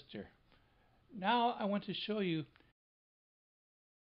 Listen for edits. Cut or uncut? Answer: uncut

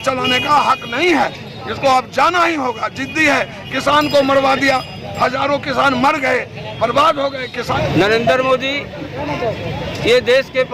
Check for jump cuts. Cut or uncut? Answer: cut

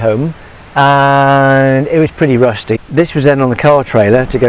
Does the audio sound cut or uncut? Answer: cut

